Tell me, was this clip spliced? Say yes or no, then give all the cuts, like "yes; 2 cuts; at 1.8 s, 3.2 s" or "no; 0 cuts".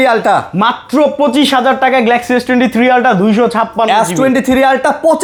no; 0 cuts